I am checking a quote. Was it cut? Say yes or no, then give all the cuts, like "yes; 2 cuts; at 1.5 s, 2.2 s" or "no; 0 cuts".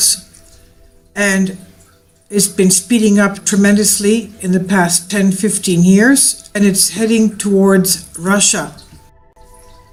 no; 0 cuts